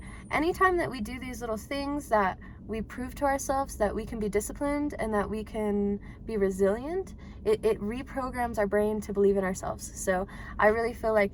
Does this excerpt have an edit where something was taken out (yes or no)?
no